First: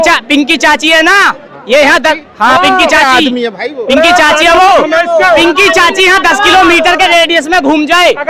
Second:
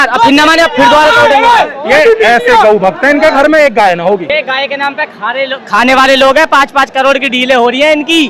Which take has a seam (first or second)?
second